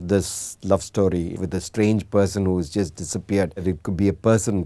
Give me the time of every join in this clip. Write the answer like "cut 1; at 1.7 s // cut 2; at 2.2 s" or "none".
cut 1; at 1.3 s // cut 2; at 3.6 s